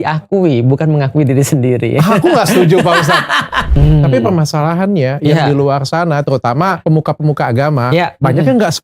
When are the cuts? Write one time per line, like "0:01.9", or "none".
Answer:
0:03.7
0:06.8